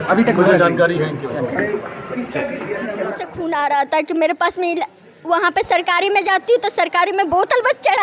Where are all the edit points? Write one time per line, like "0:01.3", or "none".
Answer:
0:03.3